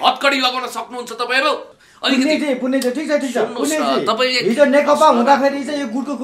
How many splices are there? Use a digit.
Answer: 1